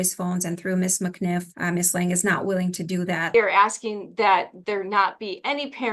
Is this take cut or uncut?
cut